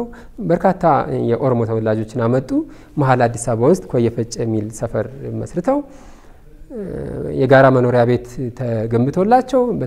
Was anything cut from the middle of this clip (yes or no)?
no